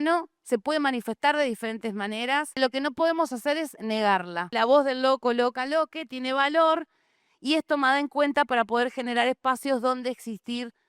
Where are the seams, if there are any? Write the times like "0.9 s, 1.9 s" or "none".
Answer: 2.6 s, 4.5 s